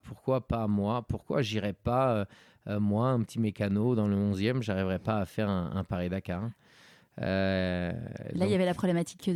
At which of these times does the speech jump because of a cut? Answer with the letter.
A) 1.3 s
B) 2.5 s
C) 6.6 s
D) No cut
D